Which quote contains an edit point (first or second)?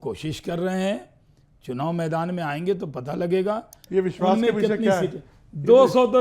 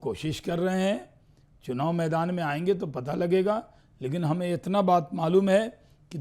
first